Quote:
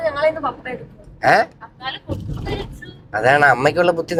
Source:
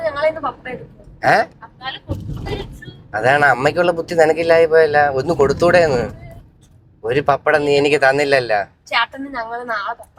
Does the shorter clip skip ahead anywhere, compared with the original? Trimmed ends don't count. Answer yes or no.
no